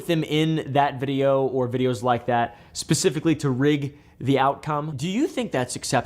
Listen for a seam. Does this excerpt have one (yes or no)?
yes